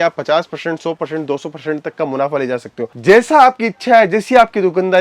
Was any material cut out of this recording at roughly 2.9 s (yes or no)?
yes